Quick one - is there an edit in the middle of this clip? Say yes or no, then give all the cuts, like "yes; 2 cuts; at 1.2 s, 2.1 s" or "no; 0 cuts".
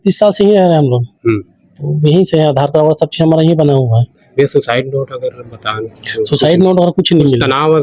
no; 0 cuts